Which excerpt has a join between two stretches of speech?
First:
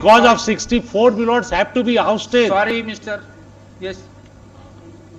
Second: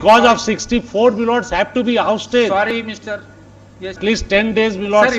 second; 1 cut; at 4.0 s

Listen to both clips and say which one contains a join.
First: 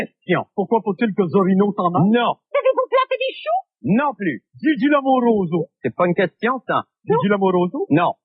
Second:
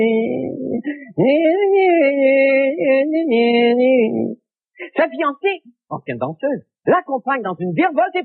first; 1 cut; at 6.0 s

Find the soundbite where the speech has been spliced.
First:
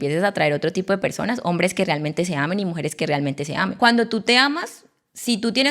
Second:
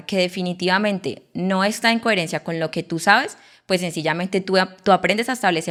first; 1 cut; at 3.8 s

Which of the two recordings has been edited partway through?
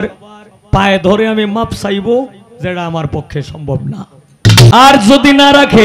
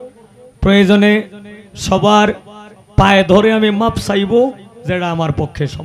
first; 1 cut; at 4.7 s

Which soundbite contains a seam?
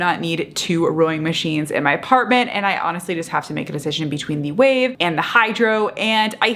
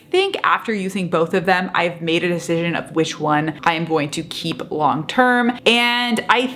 second; 2 cuts; at 3.6 s, 5.6 s

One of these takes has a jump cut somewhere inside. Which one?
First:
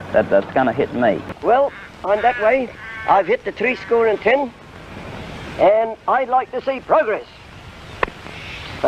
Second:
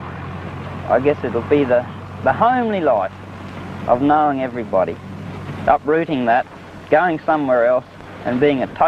first; 1 cut; at 1.3 s

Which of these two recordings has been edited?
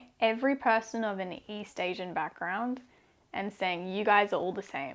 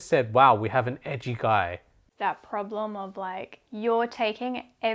second; 2 cuts; at 2.1 s, 3.6 s

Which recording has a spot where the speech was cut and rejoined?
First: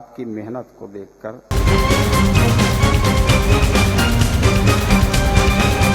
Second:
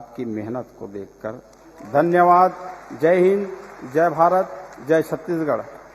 first; 1 cut; at 1.5 s

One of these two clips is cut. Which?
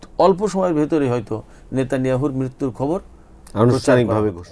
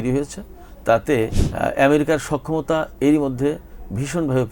second; 1 cut; at 1.4 s

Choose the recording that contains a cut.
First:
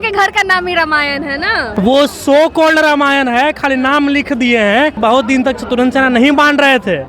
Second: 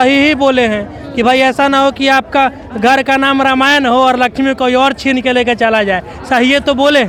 first; 2 cuts; at 1.7 s, 5.0 s

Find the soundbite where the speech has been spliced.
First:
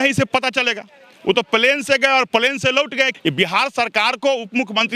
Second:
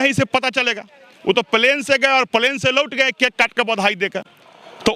first; 1 cut; at 3.1 s

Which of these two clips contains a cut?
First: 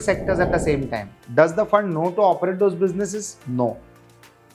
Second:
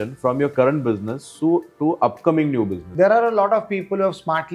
second; 1 cut; at 2.8 s

